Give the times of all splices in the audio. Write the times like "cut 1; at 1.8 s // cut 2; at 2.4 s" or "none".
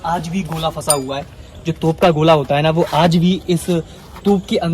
none